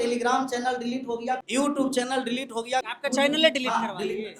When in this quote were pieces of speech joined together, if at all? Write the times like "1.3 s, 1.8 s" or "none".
1.4 s, 2.9 s